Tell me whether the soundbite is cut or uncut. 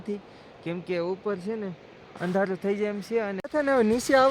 cut